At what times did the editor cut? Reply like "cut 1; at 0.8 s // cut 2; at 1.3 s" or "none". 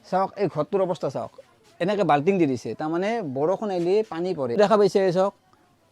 cut 1; at 4.6 s

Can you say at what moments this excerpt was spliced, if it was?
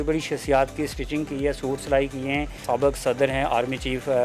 cut 1; at 2.6 s

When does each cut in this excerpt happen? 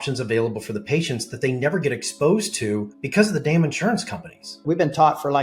cut 1; at 3.0 s // cut 2; at 4.6 s

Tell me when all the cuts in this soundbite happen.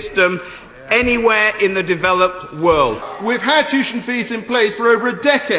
cut 1; at 3.1 s

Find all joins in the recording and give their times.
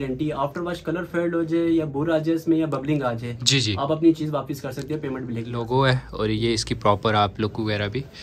cut 1; at 5.6 s

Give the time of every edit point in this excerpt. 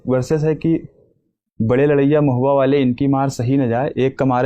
none

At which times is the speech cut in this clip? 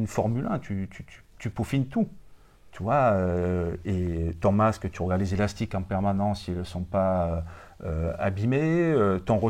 none

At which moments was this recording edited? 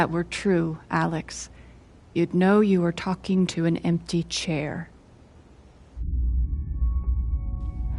none

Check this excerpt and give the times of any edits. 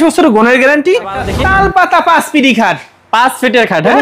cut 1; at 1.2 s

